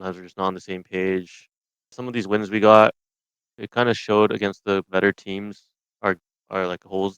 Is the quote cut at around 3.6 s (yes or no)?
yes